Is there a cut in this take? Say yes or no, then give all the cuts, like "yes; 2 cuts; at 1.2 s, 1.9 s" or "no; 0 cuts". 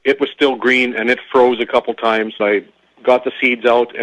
yes; 1 cut; at 2.4 s